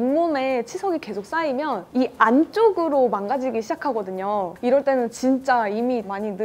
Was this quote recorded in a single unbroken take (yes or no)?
no